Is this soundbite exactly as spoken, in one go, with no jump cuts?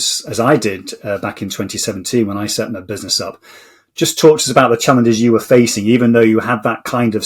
yes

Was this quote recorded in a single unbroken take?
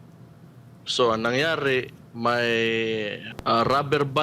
no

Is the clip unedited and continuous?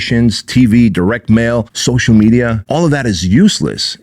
no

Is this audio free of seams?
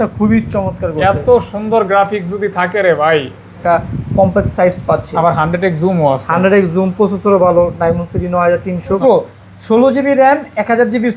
no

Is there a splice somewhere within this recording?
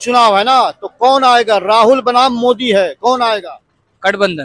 no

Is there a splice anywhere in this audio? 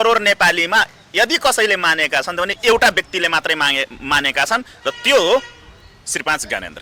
no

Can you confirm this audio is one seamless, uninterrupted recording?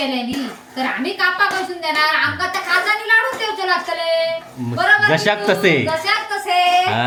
yes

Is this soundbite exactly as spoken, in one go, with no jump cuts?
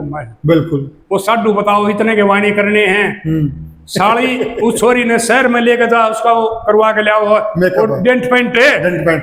yes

